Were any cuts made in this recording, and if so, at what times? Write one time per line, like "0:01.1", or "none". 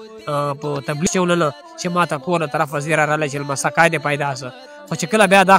0:01.1

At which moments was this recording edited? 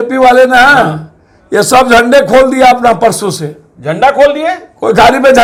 none

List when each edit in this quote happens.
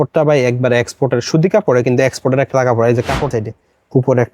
0:03.3

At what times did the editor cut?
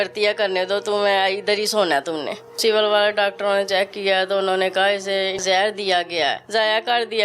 0:02.6
0:05.4
0:06.4

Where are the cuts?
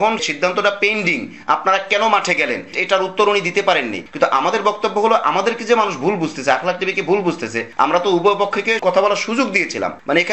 0:02.7
0:04.0
0:08.8

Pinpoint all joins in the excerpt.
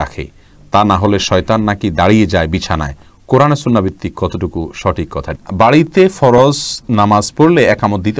0:05.4

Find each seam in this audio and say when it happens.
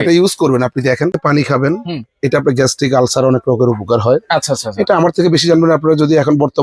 0:01.2

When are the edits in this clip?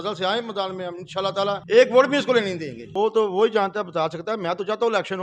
0:01.6
0:02.8

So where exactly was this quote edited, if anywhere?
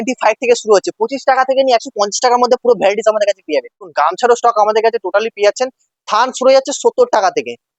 0:03.9

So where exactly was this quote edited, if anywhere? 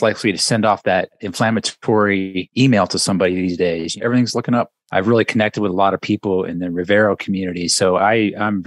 0:01.2
0:02.4
0:04.0
0:04.8

